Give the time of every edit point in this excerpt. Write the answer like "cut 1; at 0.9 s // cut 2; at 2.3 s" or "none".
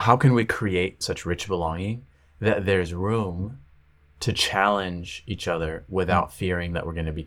cut 1; at 1.0 s